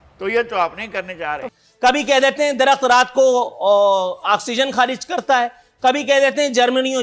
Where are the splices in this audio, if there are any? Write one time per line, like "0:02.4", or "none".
0:01.4